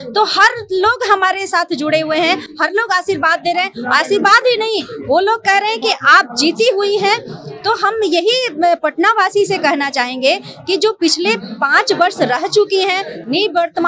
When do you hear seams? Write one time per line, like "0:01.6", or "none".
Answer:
none